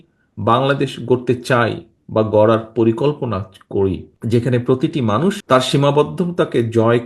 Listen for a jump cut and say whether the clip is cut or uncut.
cut